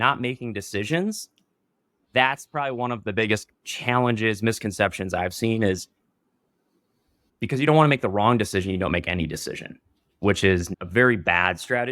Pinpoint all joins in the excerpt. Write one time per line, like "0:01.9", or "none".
0:03.5
0:07.2
0:10.8

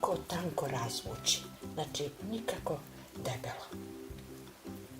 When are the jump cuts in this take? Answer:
0:02.7

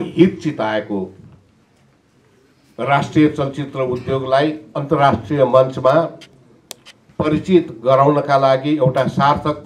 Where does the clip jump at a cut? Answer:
none

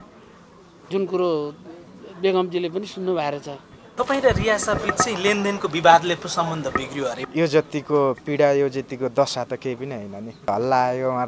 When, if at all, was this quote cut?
0:03.9
0:07.2
0:10.5

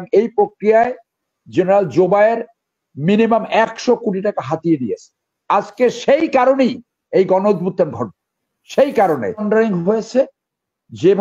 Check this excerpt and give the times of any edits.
0:09.4

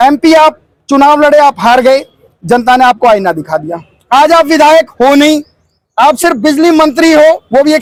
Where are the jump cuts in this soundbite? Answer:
none

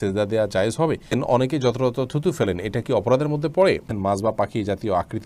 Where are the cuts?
0:01.1
0:03.9

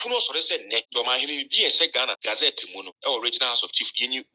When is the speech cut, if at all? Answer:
0:00.9
0:02.4

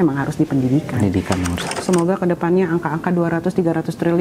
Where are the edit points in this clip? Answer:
0:01.6

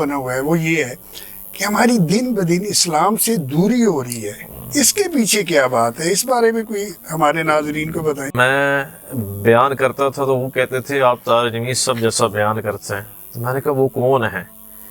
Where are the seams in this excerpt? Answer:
0:08.3

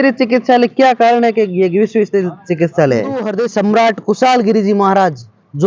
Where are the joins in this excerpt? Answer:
0:03.3

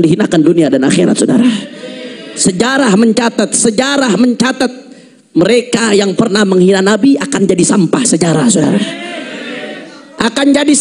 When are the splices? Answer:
none

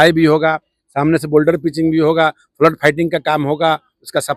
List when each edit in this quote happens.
none

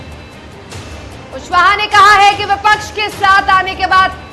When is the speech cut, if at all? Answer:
0:00.9

